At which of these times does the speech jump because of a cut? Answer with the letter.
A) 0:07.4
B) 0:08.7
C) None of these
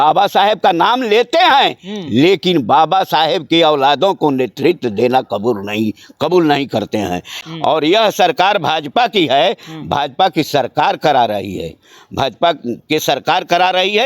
A